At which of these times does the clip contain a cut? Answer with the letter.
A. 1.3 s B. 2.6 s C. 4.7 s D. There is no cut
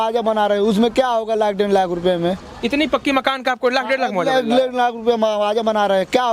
D